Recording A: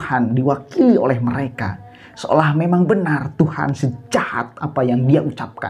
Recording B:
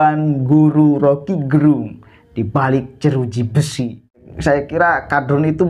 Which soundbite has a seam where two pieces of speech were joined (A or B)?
B